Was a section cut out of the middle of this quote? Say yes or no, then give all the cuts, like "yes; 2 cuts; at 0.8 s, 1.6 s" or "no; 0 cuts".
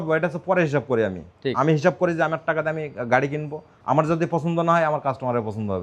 no; 0 cuts